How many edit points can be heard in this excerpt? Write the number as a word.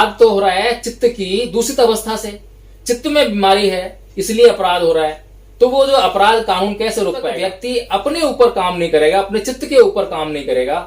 one